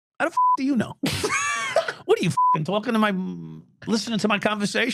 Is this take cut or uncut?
uncut